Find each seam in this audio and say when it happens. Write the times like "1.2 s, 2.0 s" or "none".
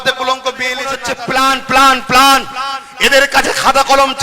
1.0 s